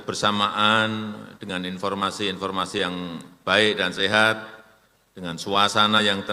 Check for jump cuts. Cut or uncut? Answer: uncut